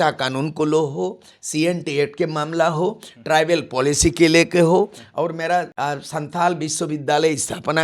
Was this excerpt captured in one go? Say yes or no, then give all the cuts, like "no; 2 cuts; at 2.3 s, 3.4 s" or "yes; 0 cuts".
no; 1 cut; at 5.7 s